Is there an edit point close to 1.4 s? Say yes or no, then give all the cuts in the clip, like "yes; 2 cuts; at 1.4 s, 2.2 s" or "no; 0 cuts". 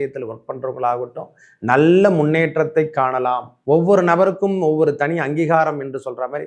no; 1 cut; at 3.5 s